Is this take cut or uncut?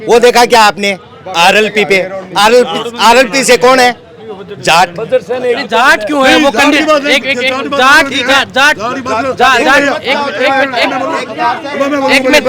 uncut